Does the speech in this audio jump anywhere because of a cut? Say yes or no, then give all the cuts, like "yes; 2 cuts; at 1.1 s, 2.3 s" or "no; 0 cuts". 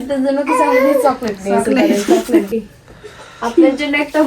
yes; 1 cut; at 2.5 s